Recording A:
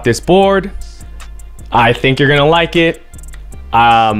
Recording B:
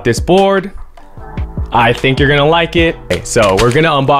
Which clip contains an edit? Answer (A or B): B